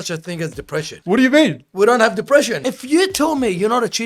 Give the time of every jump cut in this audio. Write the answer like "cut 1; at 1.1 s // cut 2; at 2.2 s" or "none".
cut 1; at 0.9 s // cut 2; at 2.6 s